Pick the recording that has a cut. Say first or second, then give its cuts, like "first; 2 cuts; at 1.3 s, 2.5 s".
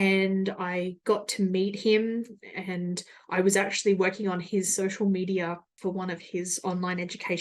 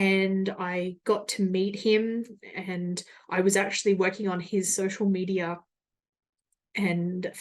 first; 1 cut; at 5.7 s